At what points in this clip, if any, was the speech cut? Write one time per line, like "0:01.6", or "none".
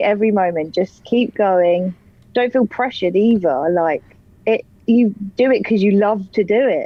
none